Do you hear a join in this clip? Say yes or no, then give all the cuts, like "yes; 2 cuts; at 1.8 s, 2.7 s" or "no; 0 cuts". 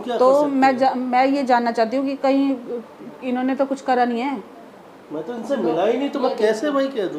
no; 0 cuts